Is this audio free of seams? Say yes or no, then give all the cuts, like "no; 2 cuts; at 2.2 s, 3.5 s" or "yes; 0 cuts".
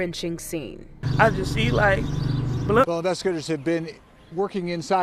no; 1 cut; at 2.6 s